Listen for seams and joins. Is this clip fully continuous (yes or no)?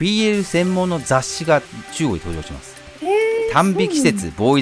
yes